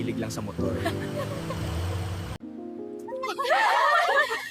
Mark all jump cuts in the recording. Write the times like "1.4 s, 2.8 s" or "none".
2.4 s